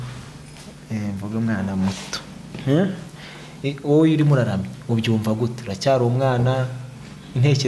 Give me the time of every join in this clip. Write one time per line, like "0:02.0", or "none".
none